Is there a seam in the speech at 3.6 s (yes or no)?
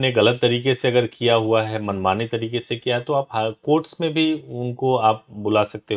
no